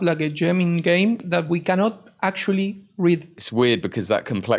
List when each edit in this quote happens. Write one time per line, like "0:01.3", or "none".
0:01.2
0:03.4